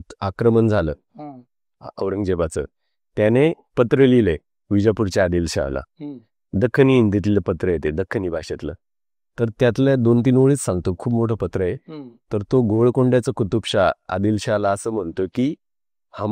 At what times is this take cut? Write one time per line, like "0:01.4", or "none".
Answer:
none